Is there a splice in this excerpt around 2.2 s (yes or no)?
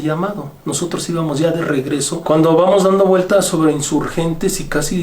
yes